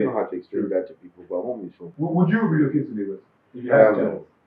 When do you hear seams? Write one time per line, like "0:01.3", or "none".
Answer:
0:01.8